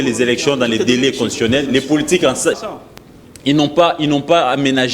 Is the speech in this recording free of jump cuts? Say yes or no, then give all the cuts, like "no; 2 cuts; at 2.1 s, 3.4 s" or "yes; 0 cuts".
no; 1 cut; at 2.6 s